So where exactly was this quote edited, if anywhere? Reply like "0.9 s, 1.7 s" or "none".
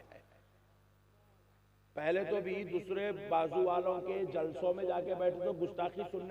none